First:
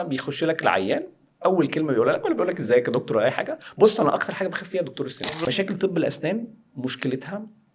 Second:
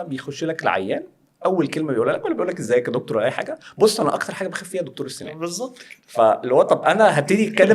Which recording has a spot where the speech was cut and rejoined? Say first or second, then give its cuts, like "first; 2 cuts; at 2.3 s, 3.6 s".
first; 1 cut; at 5.5 s